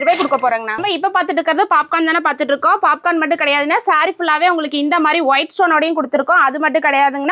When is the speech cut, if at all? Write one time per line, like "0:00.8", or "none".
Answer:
none